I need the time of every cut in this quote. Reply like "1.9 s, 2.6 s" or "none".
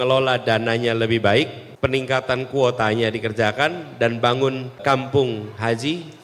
1.6 s, 4.8 s